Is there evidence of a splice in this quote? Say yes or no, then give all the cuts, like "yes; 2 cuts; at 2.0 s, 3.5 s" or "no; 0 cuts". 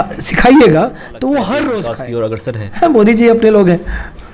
yes; 1 cut; at 2.1 s